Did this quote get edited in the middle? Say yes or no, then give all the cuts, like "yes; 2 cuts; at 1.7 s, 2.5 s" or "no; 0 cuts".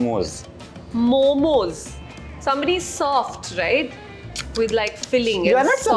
no; 0 cuts